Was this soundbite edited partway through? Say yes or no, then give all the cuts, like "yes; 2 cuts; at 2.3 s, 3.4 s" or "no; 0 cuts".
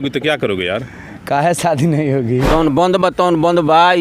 yes; 1 cut; at 2.5 s